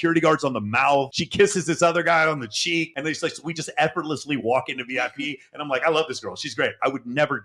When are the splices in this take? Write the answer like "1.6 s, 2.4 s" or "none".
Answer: none